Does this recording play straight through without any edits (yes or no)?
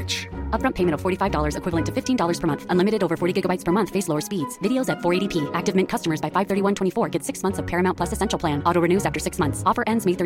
yes